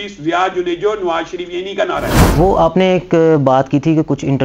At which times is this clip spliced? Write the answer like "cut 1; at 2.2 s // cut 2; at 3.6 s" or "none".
cut 1; at 2.2 s